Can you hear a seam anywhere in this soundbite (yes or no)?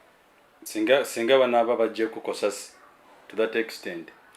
no